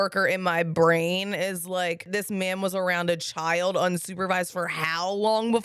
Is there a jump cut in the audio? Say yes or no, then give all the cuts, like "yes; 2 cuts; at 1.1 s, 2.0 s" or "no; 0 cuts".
yes; 1 cut; at 2.1 s